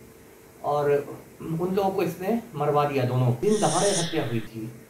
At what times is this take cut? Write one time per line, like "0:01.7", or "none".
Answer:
0:03.4

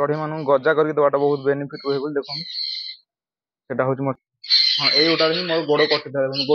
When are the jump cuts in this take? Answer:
0:04.2

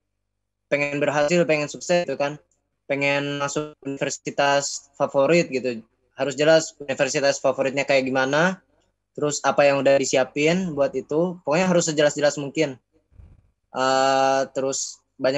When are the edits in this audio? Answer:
none

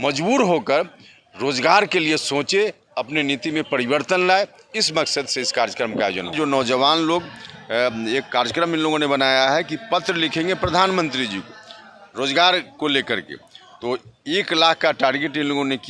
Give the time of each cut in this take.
0:06.3

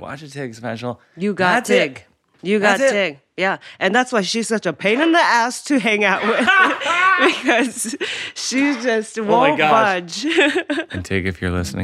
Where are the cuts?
0:10.9

